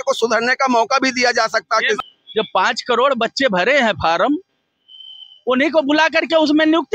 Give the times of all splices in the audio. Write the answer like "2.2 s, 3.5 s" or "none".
2.0 s